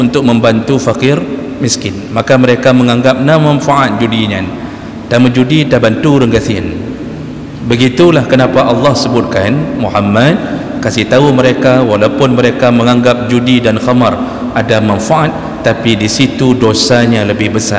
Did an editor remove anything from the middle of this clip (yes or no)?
no